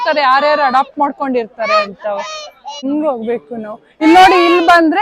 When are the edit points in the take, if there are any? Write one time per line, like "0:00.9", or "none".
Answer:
0:02.8